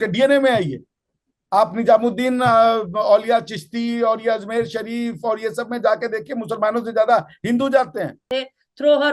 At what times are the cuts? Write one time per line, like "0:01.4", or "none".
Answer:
0:08.2